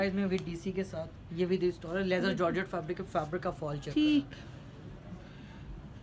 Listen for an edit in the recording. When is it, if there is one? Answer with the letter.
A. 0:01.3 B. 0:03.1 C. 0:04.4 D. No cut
D